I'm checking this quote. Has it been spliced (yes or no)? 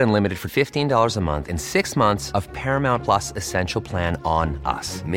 no